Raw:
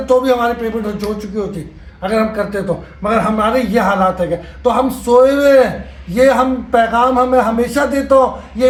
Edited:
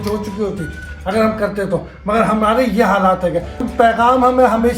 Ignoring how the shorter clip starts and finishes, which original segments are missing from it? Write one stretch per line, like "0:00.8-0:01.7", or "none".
0:04.6-0:06.5